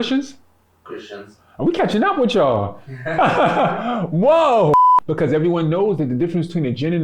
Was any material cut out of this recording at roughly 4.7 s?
yes; 1 cut; at 4.7 s

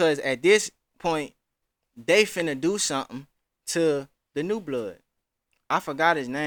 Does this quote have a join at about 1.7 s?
no; 0 cuts

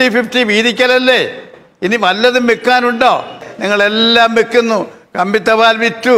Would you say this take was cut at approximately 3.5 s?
yes; 1 cut; at 3.5 s

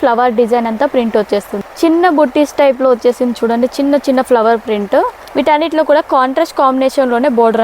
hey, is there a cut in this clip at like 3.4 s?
no; 2 cuts; at 1.6 s, 5.2 s

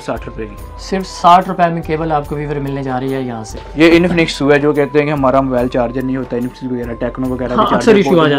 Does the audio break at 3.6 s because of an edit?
yes; 1 cut; at 3.6 s

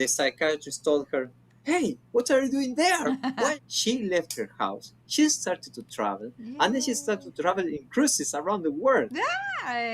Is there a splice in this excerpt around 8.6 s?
no; 1 cut; at 3.5 s

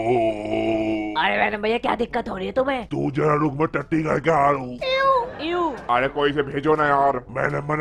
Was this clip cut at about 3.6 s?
no; 0 cuts

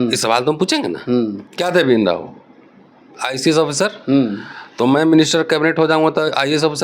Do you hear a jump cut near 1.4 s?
yes; 1 cut; at 1.4 s

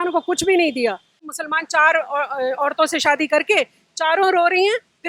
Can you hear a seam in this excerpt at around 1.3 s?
yes; 1 cut; at 1.3 s

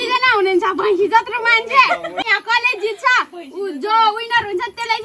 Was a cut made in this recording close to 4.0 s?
no; 1 cut; at 2.2 s

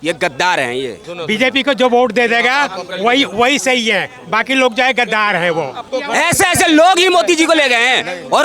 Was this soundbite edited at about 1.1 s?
yes; 2 cuts; at 1.1 s, 5.9 s

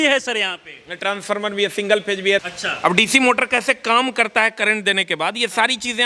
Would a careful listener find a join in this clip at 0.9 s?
no; 1 cut; at 2.4 s

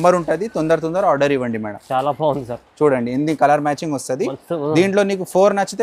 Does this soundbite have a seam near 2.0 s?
no; 0 cuts

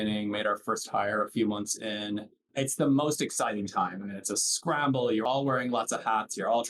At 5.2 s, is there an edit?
yes; 1 cut; at 5.2 s

